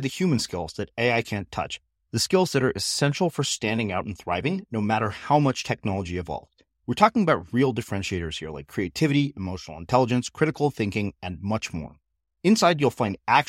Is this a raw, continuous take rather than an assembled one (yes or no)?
yes